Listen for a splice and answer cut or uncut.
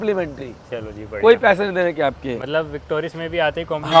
uncut